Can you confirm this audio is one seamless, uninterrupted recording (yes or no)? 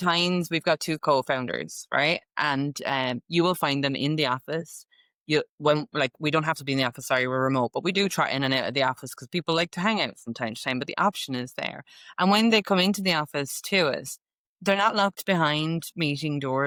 yes